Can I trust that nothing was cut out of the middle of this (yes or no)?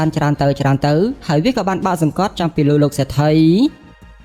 yes